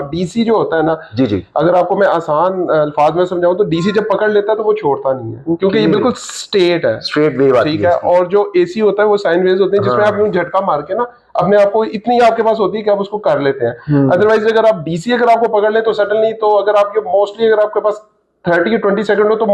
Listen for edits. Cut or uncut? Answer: uncut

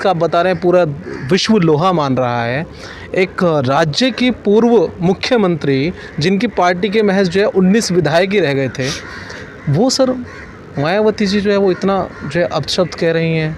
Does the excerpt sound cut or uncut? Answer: uncut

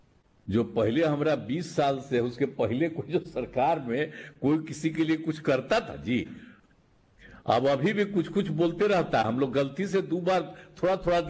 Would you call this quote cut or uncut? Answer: uncut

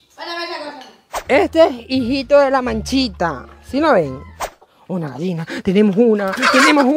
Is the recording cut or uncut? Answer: cut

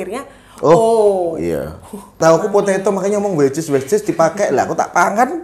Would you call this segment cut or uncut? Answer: cut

